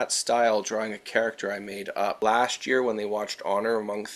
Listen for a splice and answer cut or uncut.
cut